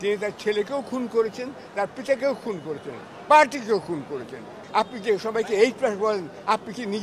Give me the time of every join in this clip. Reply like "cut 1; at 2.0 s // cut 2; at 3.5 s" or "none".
cut 1; at 4.6 s